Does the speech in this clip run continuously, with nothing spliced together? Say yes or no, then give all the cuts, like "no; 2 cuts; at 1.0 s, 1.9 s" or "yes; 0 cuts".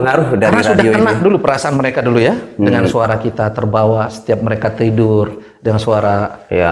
yes; 0 cuts